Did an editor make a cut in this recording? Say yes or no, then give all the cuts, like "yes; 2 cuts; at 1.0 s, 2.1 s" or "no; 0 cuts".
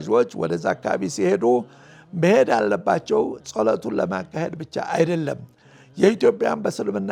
no; 0 cuts